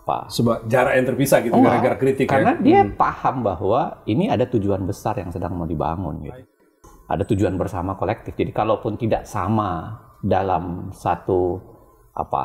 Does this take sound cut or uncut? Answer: uncut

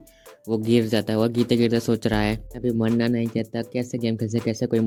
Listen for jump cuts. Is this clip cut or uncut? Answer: uncut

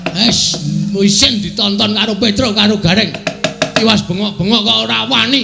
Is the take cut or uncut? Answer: uncut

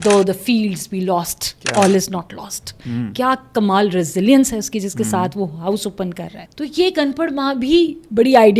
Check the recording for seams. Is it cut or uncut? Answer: cut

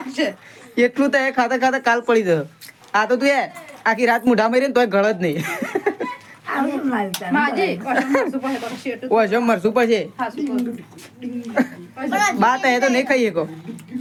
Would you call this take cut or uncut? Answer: uncut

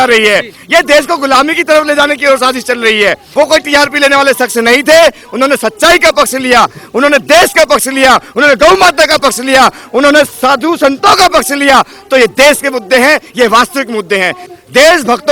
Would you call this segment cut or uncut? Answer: cut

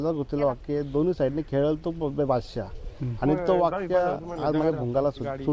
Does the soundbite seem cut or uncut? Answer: uncut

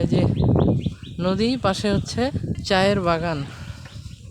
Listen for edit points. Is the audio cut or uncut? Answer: cut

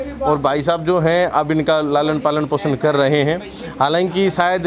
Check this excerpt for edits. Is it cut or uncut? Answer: uncut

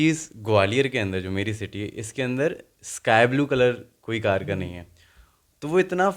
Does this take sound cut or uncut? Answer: uncut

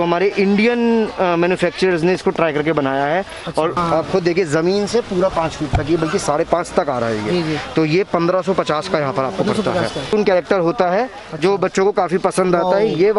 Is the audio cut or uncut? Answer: cut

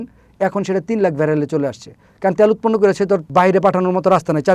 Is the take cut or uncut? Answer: cut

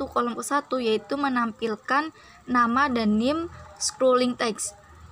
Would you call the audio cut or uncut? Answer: uncut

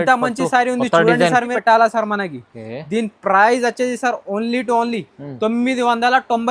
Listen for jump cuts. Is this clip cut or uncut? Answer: cut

